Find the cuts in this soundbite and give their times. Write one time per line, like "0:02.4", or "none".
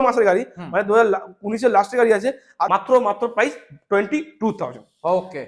0:02.6